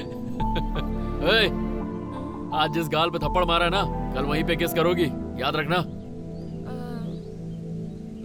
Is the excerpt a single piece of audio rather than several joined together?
yes; 0 cuts

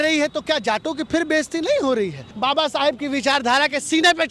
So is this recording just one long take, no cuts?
no; 1 cut; at 2.3 s

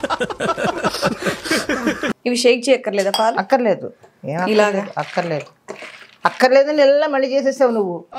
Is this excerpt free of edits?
no; 1 cut; at 2.2 s

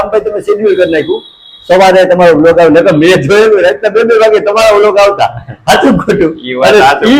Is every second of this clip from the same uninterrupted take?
yes; 0 cuts

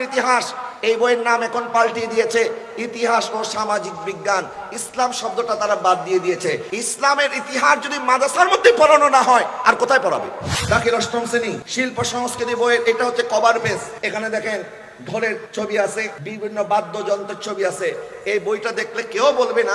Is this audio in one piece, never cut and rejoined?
no; 6 cuts; at 6.7 s, 10.5 s, 11.6 s, 13.9 s, 15.5 s, 16.2 s

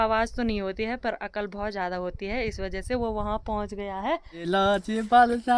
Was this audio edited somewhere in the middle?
yes; 1 cut; at 4.2 s

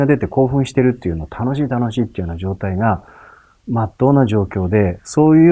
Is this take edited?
no; 0 cuts

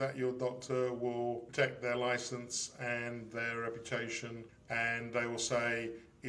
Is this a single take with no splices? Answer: no; 2 cuts; at 1.5 s, 4.5 s

